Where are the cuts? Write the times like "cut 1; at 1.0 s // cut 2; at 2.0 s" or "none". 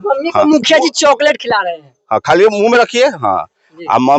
none